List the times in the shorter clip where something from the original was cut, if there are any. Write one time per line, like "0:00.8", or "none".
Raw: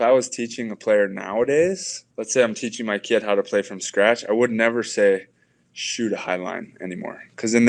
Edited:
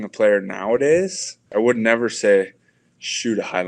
0:01.5